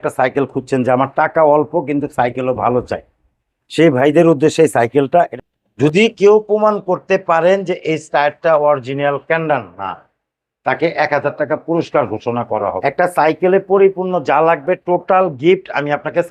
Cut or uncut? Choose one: cut